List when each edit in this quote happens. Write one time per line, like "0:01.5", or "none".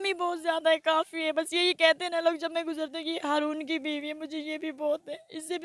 none